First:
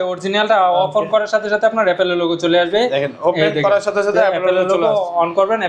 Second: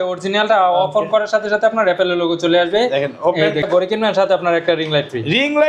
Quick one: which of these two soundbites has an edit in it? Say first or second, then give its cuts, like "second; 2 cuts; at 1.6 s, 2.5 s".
second; 1 cut; at 3.6 s